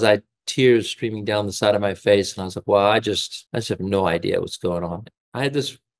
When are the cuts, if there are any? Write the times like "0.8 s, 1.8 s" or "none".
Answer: 3.3 s, 5.0 s

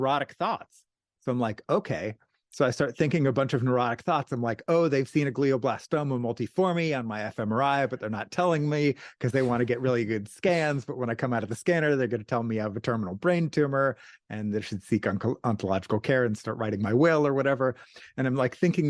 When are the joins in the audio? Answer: none

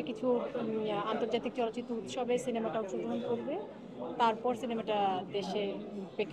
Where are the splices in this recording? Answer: none

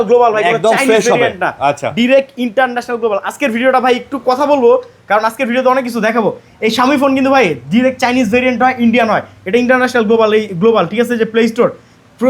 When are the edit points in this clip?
none

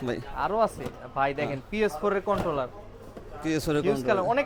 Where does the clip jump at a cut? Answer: none

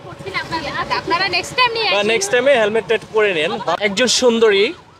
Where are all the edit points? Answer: 3.7 s

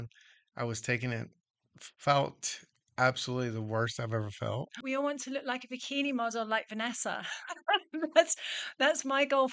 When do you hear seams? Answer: 4.8 s

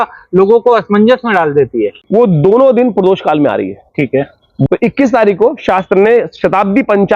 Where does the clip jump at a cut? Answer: 2.0 s, 4.7 s

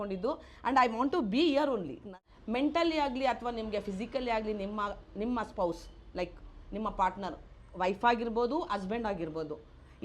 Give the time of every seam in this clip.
2.2 s

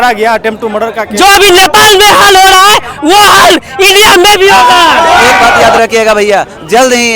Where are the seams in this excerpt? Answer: 1.0 s, 5.3 s

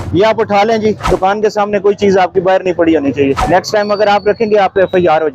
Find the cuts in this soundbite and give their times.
1.0 s, 3.4 s

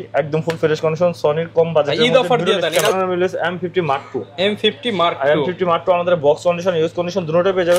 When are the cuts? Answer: 2.9 s

